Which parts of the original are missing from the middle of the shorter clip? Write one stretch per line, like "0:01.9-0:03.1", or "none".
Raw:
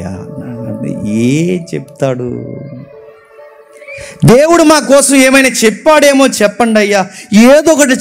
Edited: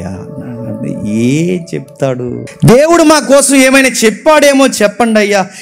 0:02.5-0:04.1